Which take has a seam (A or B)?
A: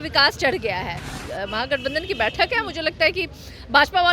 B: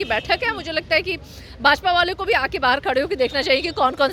A